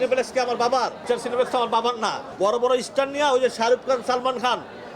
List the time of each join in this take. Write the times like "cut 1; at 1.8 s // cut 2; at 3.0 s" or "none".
cut 1; at 1.0 s // cut 2; at 2.3 s